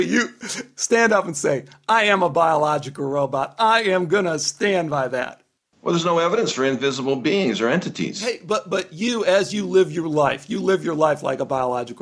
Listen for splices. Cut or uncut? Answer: uncut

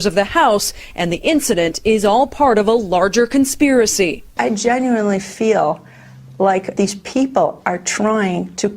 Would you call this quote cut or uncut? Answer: cut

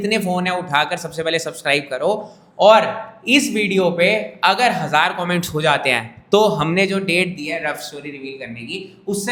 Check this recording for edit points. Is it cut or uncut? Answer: uncut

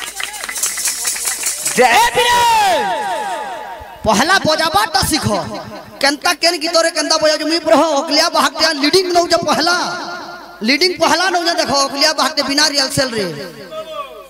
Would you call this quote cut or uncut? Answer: uncut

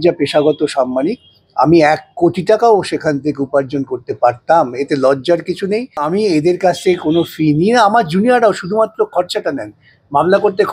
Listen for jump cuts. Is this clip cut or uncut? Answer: cut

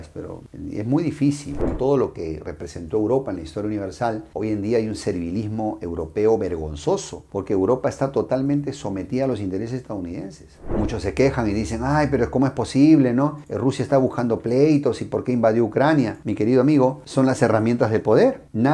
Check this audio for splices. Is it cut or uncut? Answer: cut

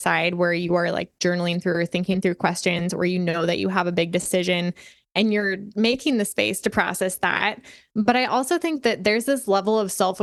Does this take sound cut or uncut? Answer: uncut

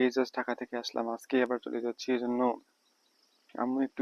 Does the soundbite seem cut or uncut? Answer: uncut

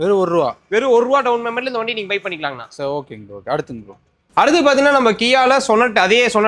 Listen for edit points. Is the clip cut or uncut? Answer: uncut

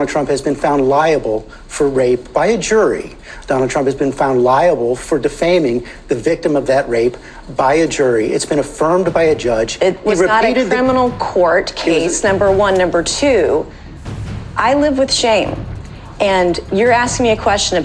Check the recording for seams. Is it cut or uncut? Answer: uncut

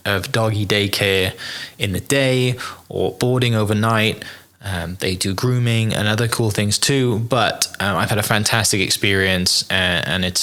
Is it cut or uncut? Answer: uncut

